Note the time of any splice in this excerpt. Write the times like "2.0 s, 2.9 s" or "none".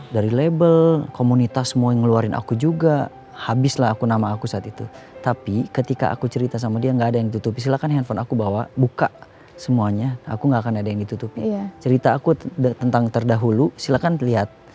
none